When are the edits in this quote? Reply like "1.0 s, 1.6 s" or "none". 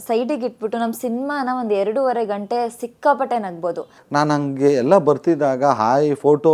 3.9 s